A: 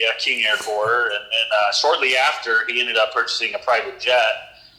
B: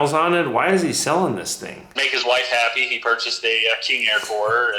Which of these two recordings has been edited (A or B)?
B